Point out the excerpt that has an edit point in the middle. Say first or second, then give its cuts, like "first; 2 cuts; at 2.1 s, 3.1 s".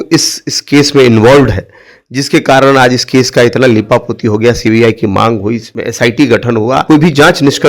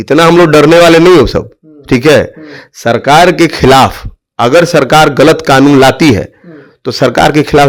first; 2 cuts; at 5.8 s, 6.8 s